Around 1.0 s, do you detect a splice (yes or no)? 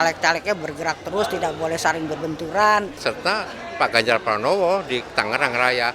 no